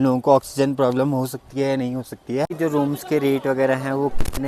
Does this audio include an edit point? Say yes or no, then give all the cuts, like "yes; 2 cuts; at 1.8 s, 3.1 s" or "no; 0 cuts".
yes; 1 cut; at 2.5 s